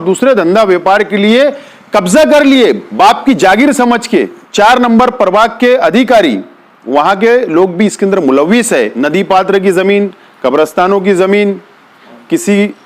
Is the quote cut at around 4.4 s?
yes; 2 cuts; at 4.4 s, 8.9 s

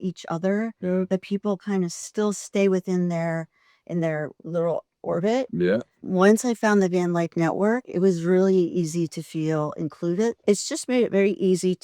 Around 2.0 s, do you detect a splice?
yes; 3 cuts; at 2.0 s, 5.9 s, 10.4 s

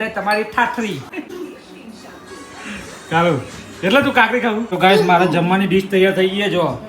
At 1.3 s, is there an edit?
yes; 2 cuts; at 1.3 s, 4.7 s

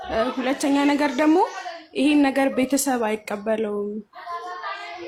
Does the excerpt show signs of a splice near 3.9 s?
no; 0 cuts

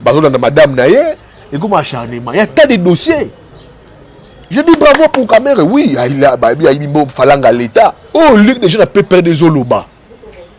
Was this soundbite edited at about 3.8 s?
no; 1 cut; at 8.0 s

